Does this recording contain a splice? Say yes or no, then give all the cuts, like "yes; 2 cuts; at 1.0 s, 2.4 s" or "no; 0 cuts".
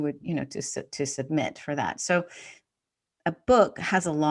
no; 0 cuts